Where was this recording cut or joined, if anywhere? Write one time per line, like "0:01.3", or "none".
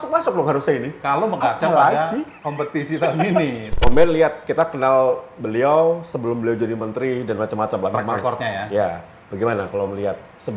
0:03.6

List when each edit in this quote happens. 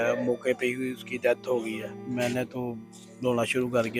0:01.9

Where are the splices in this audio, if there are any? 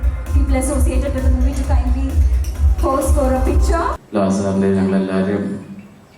0:04.0

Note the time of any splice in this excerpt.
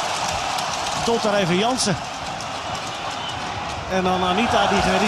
0:03.6

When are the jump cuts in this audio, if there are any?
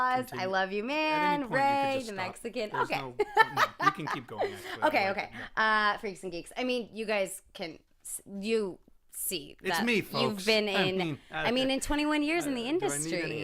0:11.6

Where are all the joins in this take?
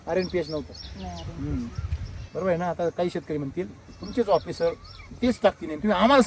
none

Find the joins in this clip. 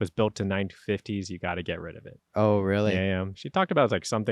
0:02.1

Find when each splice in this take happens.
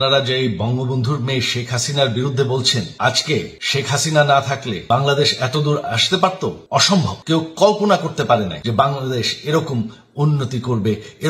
0:02.9
0:03.6
0:04.7
0:06.9
0:08.6

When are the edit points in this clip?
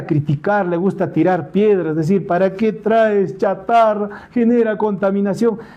none

